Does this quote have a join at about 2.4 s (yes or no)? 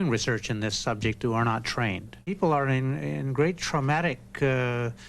yes